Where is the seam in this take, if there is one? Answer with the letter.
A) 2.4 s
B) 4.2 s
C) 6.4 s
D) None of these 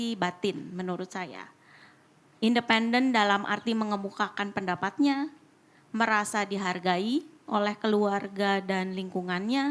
D